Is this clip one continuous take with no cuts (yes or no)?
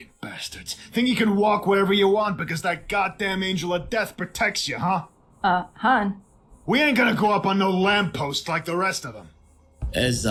yes